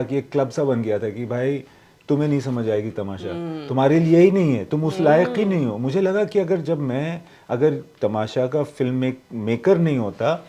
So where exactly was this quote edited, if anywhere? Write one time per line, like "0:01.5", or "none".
none